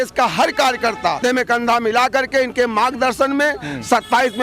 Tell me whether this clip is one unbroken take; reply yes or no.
yes